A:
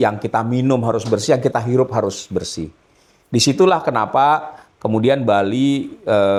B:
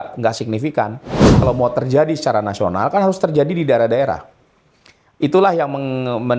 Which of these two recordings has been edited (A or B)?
B